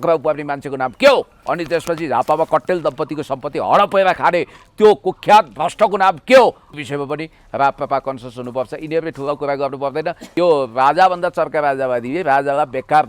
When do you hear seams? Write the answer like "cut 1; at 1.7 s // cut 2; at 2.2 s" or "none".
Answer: cut 1; at 1.4 s // cut 2; at 6.7 s // cut 3; at 10.2 s